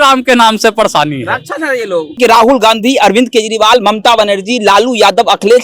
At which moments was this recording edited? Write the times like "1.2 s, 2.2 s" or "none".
2.2 s